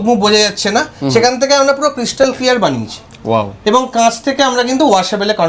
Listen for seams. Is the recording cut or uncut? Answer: uncut